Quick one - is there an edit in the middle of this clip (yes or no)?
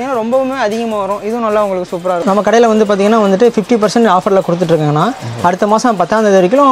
yes